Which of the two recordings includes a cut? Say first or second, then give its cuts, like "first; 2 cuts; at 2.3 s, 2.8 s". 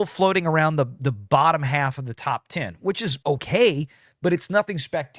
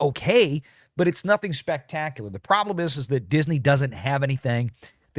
first; 1 cut; at 1.0 s